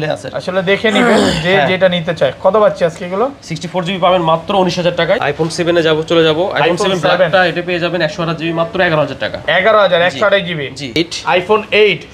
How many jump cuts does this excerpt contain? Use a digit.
2